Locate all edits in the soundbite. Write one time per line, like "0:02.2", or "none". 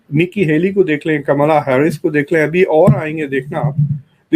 none